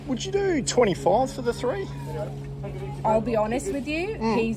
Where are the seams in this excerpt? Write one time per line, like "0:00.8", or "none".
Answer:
none